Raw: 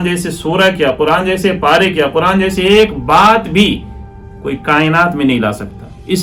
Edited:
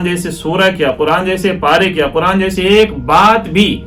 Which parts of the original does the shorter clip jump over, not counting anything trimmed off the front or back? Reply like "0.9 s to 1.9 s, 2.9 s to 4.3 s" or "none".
none